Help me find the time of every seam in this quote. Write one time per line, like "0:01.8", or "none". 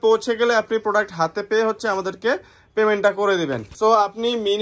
0:03.7